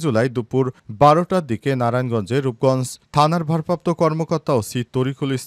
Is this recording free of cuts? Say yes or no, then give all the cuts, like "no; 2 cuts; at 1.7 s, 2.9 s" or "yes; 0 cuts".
yes; 0 cuts